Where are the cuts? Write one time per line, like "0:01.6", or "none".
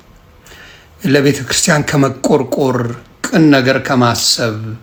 none